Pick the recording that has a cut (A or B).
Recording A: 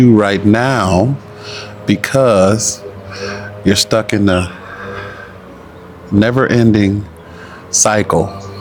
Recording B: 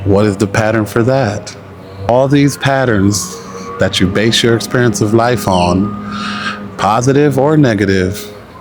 B